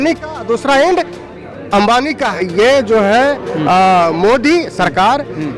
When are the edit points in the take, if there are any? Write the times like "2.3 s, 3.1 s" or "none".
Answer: 2.3 s